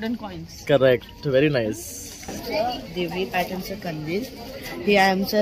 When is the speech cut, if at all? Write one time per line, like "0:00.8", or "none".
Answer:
0:02.4